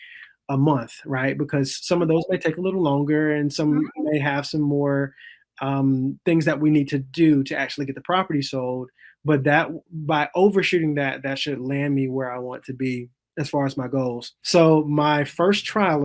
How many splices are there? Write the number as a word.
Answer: one